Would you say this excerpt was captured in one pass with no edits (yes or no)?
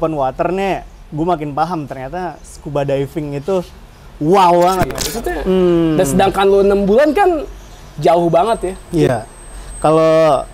no